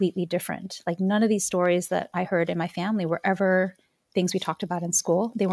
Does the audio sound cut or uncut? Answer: uncut